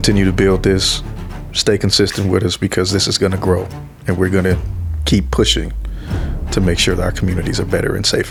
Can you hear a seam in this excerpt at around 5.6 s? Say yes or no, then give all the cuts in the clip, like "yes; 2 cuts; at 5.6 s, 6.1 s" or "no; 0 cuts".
no; 0 cuts